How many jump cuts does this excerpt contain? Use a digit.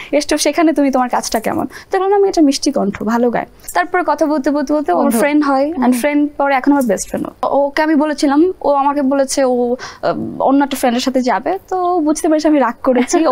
2